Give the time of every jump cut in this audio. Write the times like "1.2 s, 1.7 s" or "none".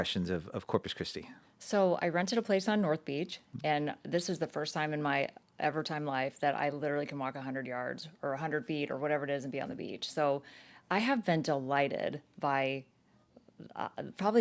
none

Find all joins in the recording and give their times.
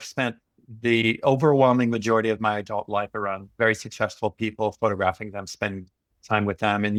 none

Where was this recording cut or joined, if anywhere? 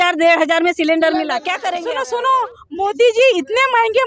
1.8 s

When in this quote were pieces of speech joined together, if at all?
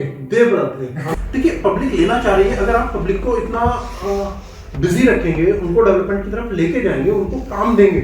1.1 s

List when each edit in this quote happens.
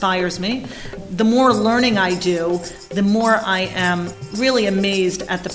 0.9 s, 2.9 s

